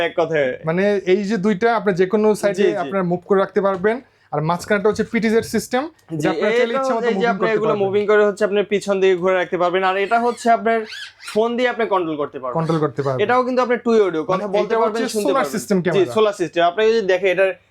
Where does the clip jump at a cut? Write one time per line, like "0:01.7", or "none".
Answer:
none